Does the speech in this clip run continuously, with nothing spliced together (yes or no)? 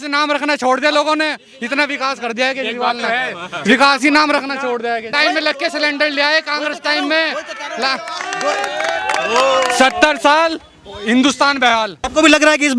no